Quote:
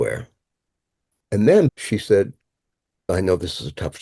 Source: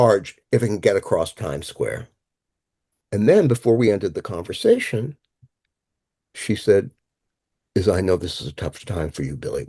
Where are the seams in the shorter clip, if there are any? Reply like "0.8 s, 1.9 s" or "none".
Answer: 1.7 s, 3.1 s